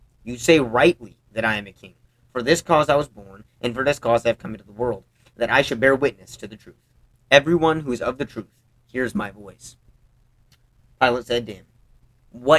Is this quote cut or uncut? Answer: uncut